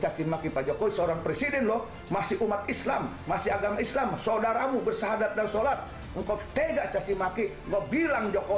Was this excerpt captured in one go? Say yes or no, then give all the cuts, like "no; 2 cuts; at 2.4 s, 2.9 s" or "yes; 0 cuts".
yes; 0 cuts